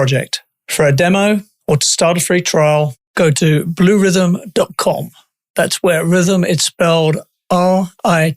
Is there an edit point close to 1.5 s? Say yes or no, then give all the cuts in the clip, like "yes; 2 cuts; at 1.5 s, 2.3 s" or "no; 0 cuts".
yes; 1 cut; at 1.5 s